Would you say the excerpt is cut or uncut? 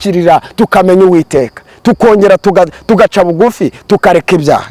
uncut